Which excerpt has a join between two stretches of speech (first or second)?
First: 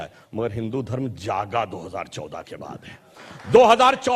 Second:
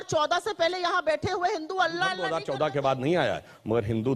second